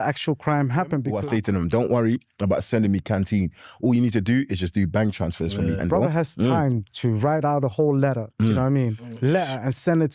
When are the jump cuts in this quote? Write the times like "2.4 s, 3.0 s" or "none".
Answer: 1.1 s, 5.8 s